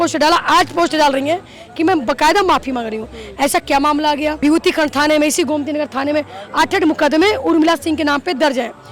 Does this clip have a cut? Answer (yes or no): yes